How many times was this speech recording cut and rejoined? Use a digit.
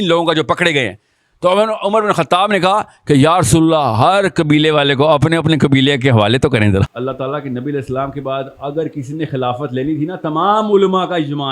1